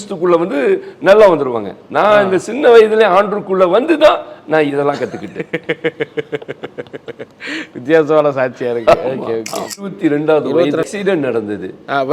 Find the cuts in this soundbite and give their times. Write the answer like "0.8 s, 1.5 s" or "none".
9.8 s, 10.8 s